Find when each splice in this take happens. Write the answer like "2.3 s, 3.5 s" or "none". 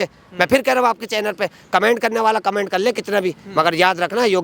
none